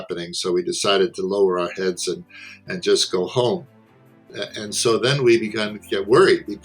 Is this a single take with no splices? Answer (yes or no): no